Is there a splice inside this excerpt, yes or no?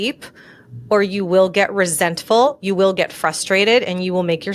no